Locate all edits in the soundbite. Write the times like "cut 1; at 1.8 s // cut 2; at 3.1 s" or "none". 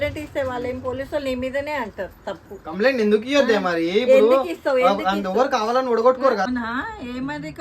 cut 1; at 6.5 s